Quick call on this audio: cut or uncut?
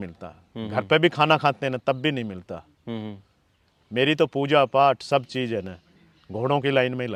uncut